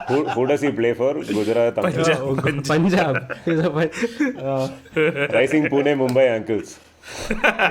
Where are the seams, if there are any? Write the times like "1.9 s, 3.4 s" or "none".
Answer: none